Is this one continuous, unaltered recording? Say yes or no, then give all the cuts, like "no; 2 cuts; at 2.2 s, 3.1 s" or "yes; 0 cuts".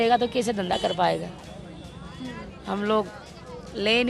yes; 0 cuts